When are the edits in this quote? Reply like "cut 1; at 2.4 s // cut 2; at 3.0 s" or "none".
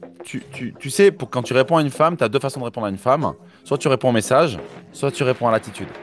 none